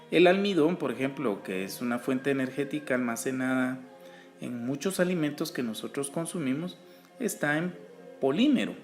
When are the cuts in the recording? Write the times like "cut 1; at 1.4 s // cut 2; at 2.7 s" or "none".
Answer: cut 1; at 5.7 s